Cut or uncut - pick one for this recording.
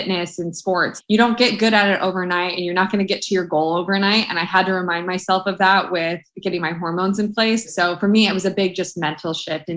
cut